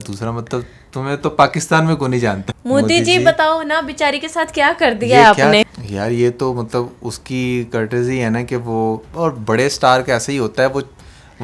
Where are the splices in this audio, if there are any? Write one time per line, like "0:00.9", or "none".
0:02.5
0:05.8